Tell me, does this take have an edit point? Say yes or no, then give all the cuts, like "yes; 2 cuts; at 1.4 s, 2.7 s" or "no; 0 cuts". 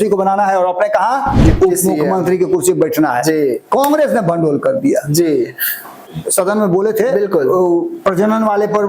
yes; 1 cut; at 6.2 s